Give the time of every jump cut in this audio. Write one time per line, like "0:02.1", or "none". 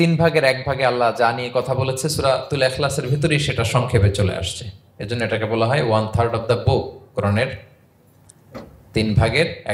none

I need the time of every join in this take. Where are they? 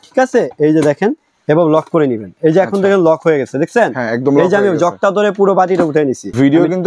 none

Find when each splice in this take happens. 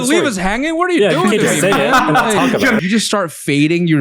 0:02.8

